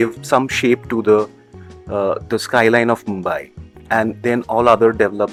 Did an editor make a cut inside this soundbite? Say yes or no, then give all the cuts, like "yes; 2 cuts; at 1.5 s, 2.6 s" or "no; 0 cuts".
no; 0 cuts